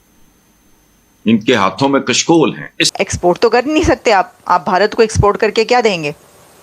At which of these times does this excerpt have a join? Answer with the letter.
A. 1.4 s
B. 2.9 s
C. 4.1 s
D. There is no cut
B